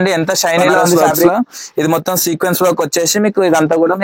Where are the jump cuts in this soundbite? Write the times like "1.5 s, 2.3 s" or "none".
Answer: 1.3 s